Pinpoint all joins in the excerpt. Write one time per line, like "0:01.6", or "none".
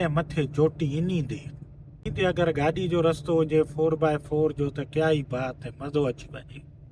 0:02.1